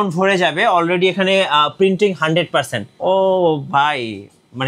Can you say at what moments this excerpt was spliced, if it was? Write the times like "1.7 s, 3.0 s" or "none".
2.9 s

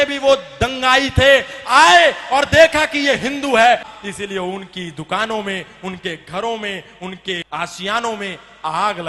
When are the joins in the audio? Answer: 3.9 s, 7.4 s

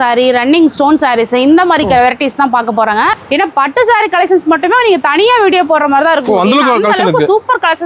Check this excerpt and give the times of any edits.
3.1 s

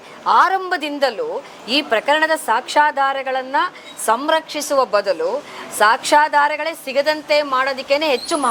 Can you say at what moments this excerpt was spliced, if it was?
none

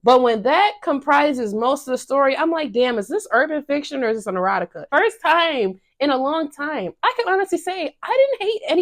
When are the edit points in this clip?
4.9 s

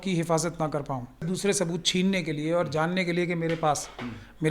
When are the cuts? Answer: 1.2 s

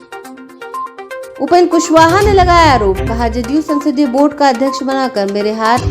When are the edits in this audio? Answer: 0.9 s

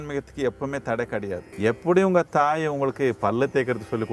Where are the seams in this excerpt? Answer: 1.4 s

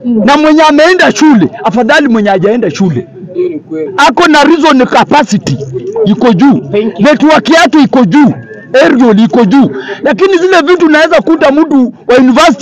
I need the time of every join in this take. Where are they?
none

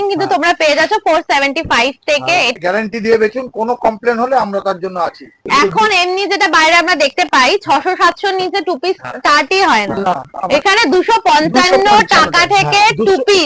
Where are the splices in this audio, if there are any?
2.5 s, 5.4 s

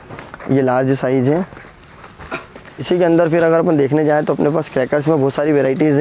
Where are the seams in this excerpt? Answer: 2.8 s

